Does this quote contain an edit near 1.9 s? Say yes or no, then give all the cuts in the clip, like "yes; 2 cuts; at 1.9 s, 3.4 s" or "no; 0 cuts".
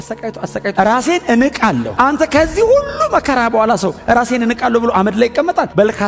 yes; 1 cut; at 1.9 s